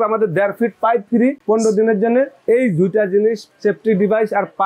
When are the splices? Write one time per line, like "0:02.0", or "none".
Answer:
0:01.4